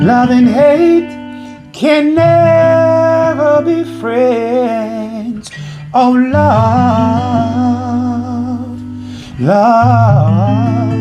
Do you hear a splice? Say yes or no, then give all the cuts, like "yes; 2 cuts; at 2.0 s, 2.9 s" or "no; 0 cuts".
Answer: no; 0 cuts